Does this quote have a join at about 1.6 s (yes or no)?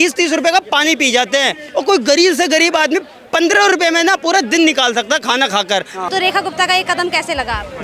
no